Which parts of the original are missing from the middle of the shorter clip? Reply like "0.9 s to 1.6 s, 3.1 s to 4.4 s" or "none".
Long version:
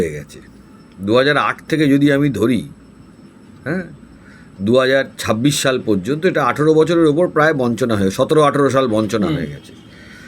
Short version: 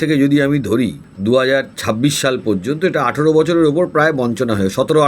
2.8 s to 4.5 s